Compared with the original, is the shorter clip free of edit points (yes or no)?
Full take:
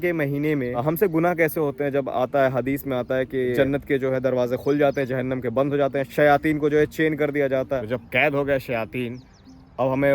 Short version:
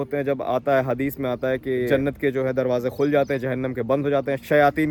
yes